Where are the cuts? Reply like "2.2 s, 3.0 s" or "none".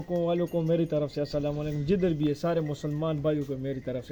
none